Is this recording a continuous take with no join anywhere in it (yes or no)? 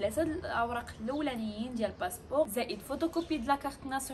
no